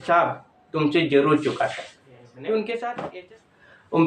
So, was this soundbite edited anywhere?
yes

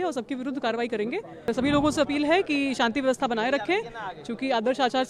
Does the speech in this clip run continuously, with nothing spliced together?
no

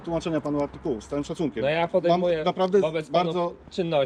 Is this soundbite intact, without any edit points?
yes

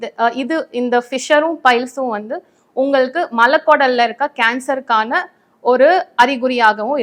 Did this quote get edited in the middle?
no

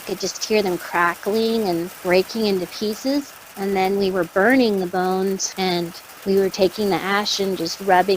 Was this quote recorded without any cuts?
no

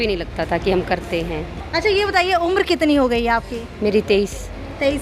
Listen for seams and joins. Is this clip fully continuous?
no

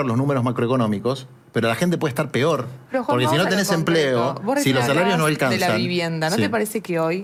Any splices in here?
no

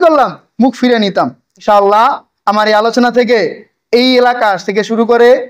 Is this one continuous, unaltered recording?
no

